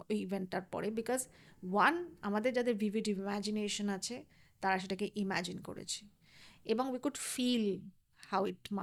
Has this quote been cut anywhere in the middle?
no; 0 cuts

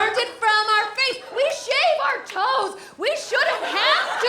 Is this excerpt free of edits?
no; 1 cut; at 1.3 s

